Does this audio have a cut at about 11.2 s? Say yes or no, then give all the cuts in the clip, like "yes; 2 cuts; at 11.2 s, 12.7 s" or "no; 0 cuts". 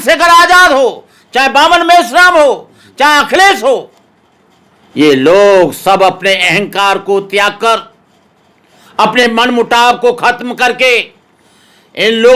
no; 0 cuts